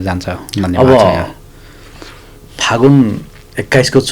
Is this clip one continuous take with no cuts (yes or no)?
yes